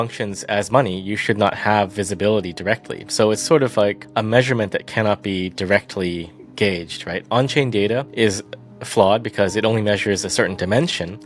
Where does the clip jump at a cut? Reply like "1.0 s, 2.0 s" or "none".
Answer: 4.0 s, 8.1 s